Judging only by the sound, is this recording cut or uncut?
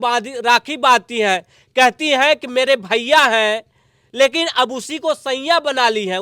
uncut